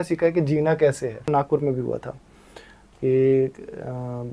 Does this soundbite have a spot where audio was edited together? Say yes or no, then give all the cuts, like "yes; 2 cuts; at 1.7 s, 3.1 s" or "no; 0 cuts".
yes; 1 cut; at 1.3 s